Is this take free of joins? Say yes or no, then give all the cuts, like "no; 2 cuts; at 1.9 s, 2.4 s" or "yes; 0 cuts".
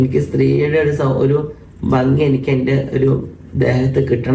yes; 0 cuts